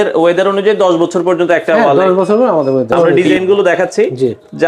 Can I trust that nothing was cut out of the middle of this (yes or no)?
no